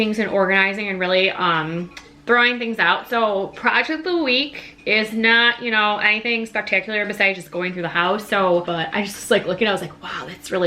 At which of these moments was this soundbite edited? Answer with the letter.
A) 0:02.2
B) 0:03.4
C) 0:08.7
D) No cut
C